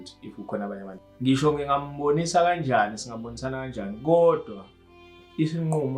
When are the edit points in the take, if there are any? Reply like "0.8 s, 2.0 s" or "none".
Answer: 0.9 s